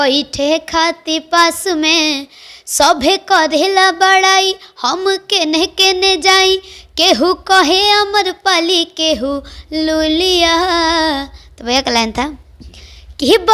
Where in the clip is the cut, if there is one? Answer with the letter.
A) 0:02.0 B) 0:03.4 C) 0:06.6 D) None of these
D